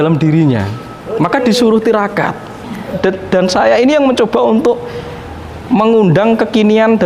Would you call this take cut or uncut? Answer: cut